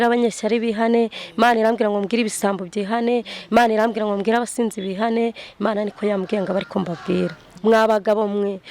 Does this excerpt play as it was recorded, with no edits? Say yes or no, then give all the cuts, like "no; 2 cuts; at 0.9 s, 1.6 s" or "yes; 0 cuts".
no; 1 cut; at 7.5 s